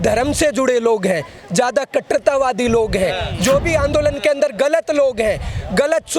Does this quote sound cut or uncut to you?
uncut